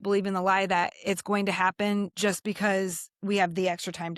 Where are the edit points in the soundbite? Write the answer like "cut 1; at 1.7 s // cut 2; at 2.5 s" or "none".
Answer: cut 1; at 2.1 s